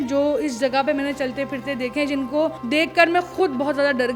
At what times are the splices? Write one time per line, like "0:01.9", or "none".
0:02.6